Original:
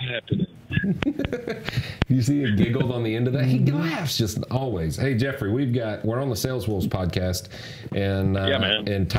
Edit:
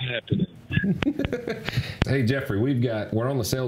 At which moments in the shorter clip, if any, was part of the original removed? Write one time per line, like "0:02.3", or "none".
0:02.1